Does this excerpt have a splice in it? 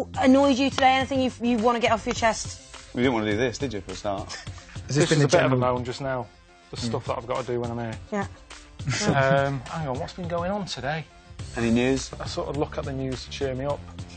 yes; 1 cut; at 10.7 s

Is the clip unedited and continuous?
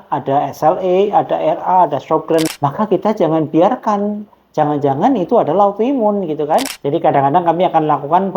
no; 2 cuts; at 2.5 s, 6.8 s

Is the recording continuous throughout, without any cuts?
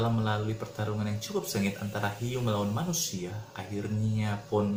yes; 0 cuts

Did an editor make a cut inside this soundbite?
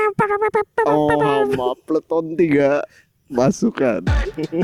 no; 0 cuts

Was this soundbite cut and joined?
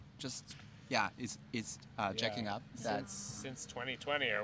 no; 0 cuts

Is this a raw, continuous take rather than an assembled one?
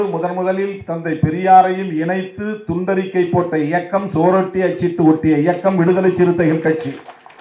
yes; 0 cuts

